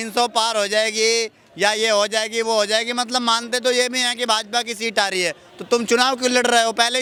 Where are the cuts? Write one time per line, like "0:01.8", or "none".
none